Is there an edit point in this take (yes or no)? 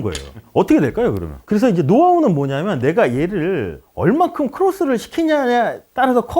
yes